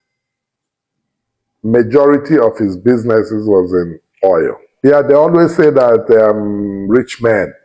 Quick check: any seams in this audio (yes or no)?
yes